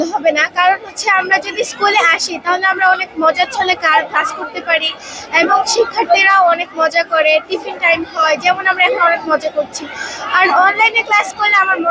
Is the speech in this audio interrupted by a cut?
no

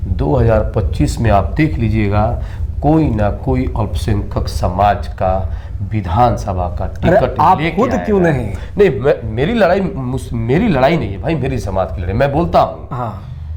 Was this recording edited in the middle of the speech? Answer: no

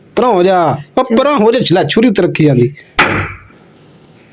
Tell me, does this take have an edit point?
no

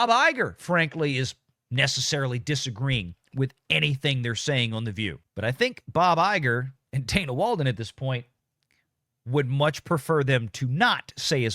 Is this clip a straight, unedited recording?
no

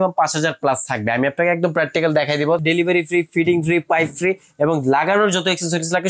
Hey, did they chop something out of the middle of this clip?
yes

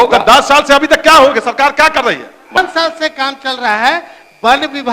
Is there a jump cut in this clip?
yes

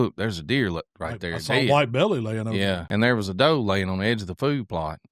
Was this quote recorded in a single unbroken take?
no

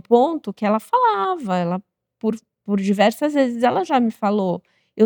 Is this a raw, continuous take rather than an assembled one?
yes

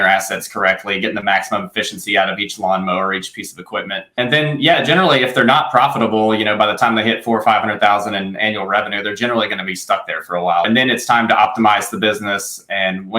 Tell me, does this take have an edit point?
yes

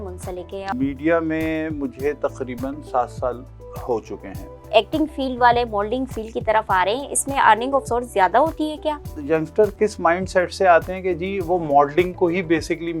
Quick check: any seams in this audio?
yes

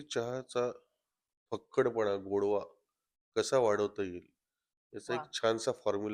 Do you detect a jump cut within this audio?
no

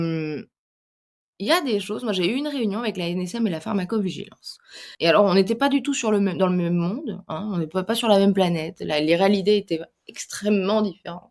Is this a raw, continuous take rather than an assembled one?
no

